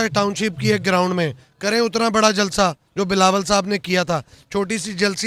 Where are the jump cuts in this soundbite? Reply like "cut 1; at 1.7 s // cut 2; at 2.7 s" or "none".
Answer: none